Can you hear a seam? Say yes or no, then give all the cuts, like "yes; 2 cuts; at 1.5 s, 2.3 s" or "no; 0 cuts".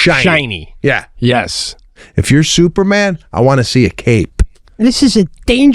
yes; 2 cuts; at 2.1 s, 4.8 s